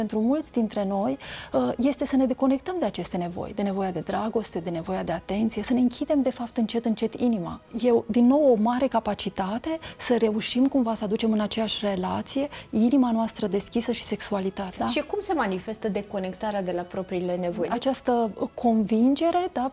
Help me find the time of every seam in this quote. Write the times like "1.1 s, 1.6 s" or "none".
7.7 s, 14.7 s, 17.7 s